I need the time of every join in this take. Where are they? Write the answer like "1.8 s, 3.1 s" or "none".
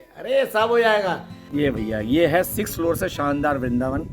1.3 s